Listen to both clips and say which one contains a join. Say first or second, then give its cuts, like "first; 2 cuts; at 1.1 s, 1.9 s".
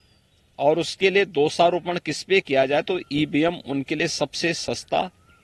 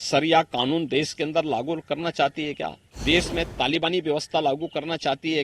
second; 1 cut; at 2.9 s